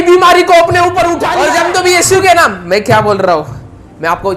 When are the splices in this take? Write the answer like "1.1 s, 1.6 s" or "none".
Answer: 1.2 s